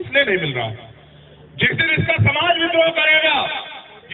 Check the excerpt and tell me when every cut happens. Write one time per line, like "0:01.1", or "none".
none

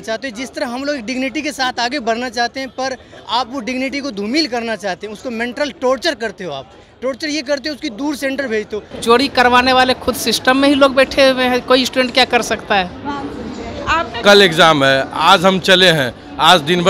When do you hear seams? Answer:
0:08.9
0:14.1

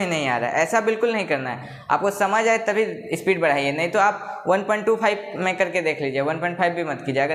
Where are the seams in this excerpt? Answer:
none

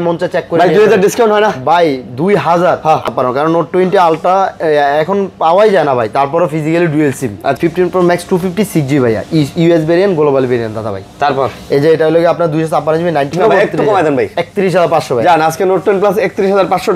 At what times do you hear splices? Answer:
0:03.1
0:07.6
0:13.3

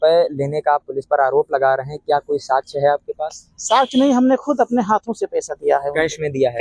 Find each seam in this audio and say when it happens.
none

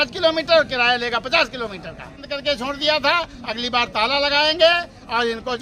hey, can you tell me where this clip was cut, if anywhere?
0:02.3

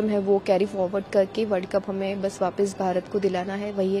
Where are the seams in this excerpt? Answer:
none

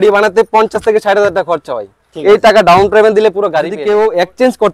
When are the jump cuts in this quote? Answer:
0:03.7

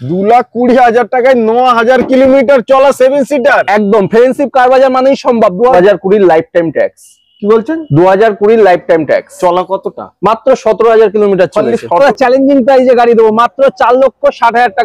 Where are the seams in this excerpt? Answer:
0:05.7
0:12.0

